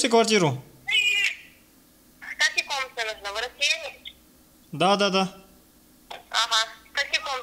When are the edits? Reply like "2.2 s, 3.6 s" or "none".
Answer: none